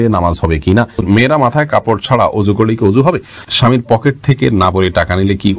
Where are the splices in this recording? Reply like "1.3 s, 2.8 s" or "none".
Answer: 1.0 s, 3.4 s